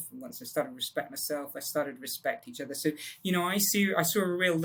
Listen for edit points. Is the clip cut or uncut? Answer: uncut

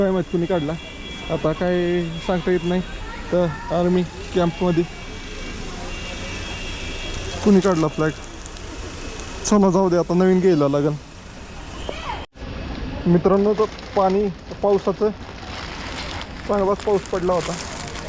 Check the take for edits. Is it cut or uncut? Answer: uncut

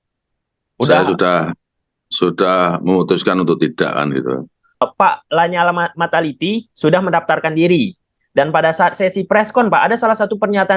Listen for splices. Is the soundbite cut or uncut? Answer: cut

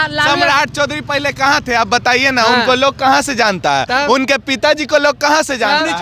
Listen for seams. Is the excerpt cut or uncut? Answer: uncut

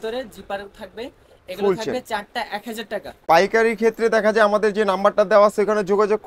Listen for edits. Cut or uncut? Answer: cut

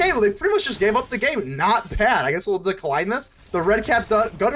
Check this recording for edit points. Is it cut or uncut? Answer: uncut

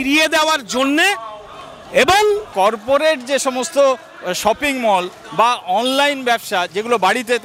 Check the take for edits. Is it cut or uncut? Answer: uncut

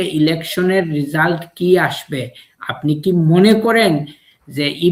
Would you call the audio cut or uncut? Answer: uncut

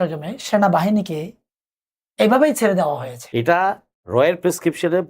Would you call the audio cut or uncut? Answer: cut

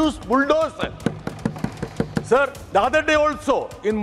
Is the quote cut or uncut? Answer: cut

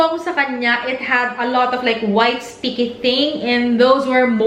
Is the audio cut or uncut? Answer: uncut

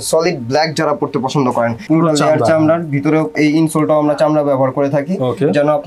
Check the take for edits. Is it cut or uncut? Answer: cut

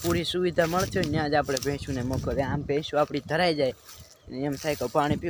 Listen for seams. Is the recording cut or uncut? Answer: uncut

